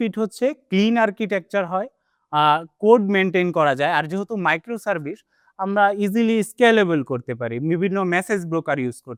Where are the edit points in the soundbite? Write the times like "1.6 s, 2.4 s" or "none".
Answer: none